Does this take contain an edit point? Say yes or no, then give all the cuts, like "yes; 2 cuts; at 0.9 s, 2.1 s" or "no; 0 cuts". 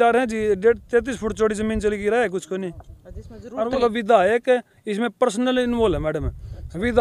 yes; 1 cut; at 3.7 s